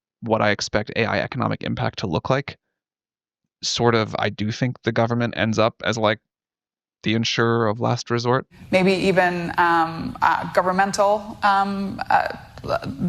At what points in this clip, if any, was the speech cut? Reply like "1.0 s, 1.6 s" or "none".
8.5 s

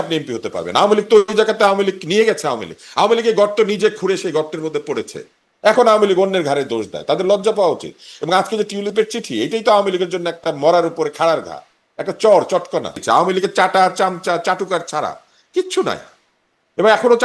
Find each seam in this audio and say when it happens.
13.0 s

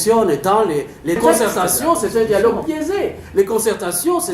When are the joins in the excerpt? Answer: 1.2 s

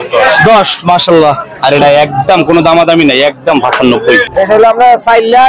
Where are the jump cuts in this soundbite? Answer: 4.2 s

